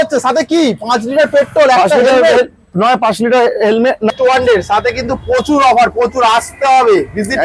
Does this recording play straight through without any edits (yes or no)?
no